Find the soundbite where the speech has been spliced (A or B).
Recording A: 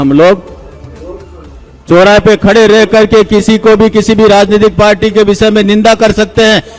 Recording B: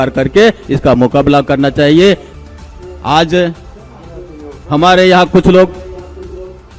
B